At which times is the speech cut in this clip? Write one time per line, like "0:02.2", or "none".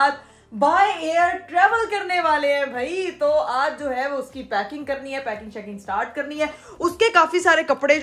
none